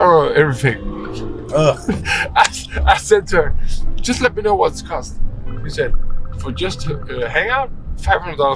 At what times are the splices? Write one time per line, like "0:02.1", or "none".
none